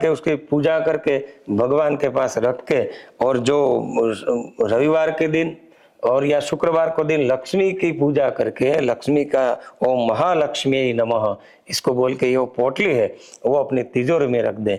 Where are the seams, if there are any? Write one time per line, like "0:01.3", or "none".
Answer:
none